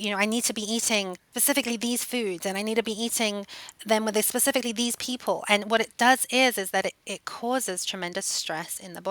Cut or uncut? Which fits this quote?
cut